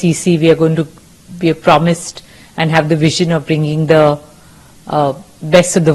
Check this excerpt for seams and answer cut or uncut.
uncut